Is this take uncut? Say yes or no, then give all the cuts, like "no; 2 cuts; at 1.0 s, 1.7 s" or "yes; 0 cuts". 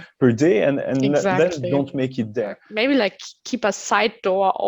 no; 1 cut; at 2.6 s